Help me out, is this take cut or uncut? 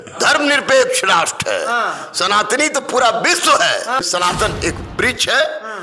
cut